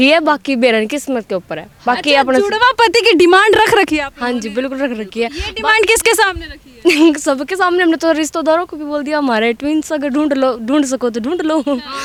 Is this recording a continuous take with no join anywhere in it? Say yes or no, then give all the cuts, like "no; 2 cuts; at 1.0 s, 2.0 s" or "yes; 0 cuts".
yes; 0 cuts